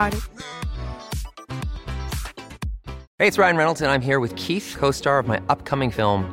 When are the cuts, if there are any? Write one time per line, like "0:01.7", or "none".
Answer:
0:03.0